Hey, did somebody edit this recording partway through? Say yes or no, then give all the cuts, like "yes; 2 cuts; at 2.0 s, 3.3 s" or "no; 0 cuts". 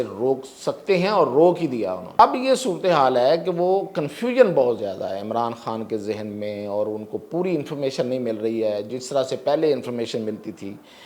yes; 1 cut; at 2.1 s